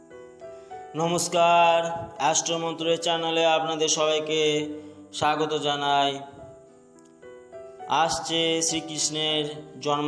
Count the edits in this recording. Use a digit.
1